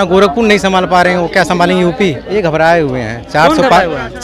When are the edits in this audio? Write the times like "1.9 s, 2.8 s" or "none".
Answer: 2.2 s